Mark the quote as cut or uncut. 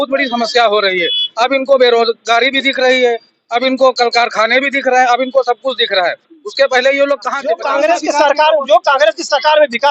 cut